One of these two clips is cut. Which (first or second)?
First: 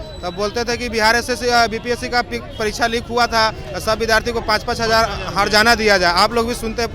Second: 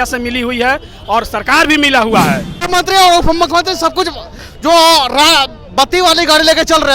second